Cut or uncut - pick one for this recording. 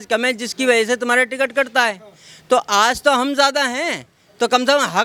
uncut